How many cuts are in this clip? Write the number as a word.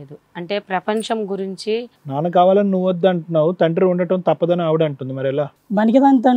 one